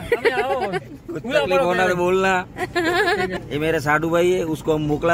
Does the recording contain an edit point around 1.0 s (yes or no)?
no